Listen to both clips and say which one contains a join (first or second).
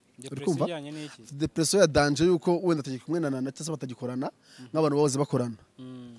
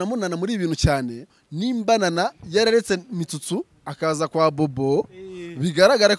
second